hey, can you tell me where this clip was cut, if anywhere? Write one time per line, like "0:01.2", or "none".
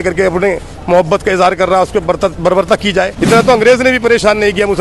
0:03.2